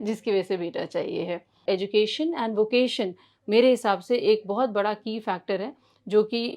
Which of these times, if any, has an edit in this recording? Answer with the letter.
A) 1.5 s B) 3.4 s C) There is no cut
A